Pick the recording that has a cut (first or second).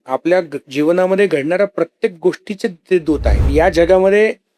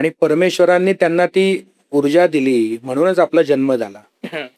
first